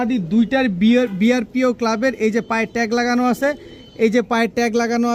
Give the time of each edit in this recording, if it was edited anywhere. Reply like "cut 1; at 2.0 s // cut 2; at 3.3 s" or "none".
none